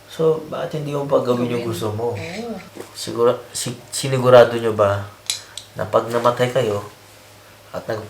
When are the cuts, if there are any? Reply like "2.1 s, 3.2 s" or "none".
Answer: 2.7 s